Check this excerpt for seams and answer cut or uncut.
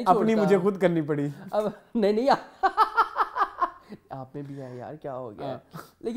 uncut